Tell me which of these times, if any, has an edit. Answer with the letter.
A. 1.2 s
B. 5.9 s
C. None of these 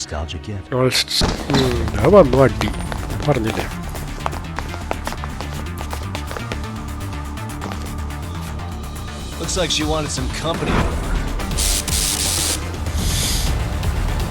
A